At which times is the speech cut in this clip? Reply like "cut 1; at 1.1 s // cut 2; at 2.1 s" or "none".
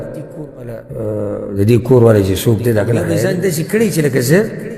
cut 1; at 3.1 s